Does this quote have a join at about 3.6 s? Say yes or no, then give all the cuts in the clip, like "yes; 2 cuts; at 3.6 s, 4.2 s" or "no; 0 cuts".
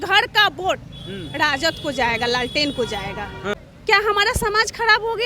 yes; 1 cut; at 3.6 s